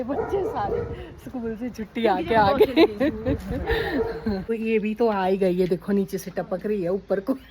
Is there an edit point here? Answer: yes; 1 cut; at 4.5 s

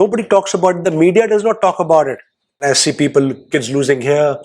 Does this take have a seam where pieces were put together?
yes; 1 cut; at 2.6 s

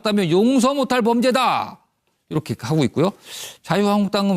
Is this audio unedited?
no; 1 cut; at 1.2 s

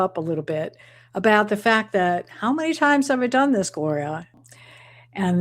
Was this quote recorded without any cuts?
no; 1 cut; at 4.4 s

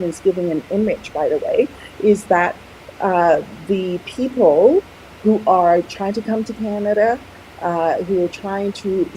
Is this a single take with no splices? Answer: yes; 0 cuts

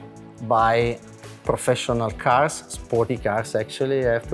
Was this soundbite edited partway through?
no; 0 cuts

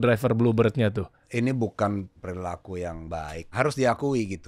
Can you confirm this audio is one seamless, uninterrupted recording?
no; 3 cuts; at 1.2 s, 2.2 s, 3.5 s

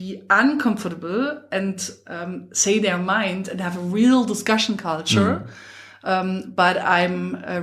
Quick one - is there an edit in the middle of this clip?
no; 0 cuts

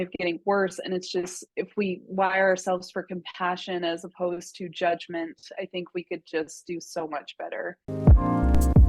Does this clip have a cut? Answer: yes; 1 cut; at 7.8 s

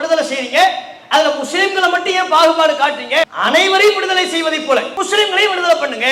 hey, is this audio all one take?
no; 2 cuts; at 3.3 s, 4.9 s

